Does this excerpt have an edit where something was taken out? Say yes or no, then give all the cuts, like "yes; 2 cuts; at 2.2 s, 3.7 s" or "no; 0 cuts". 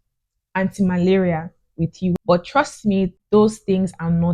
yes; 2 cuts; at 2.1 s, 3.2 s